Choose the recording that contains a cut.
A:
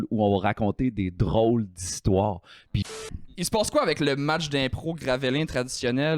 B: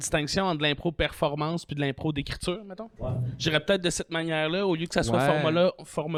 A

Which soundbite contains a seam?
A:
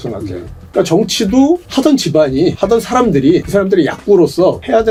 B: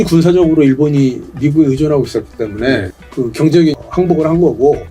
B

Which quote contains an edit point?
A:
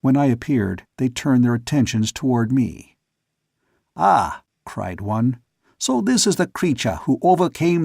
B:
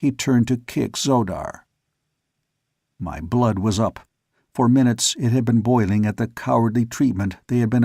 A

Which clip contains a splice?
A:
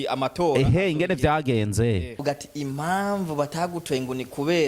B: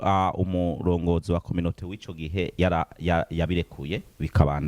A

